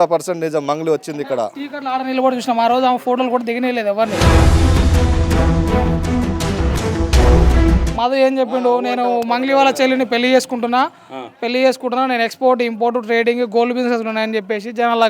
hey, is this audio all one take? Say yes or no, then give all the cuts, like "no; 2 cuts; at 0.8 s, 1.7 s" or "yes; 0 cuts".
no; 3 cuts; at 1.7 s, 4.2 s, 7.9 s